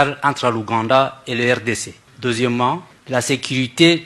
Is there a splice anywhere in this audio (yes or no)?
yes